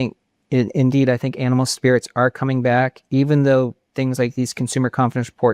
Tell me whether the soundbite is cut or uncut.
uncut